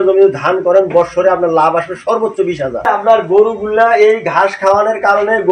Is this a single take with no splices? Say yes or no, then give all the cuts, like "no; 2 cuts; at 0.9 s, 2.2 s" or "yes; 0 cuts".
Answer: no; 1 cut; at 3.2 s